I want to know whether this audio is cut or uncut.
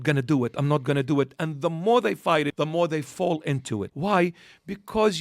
cut